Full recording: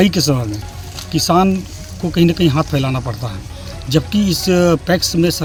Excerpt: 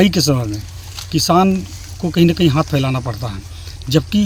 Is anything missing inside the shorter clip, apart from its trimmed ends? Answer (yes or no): no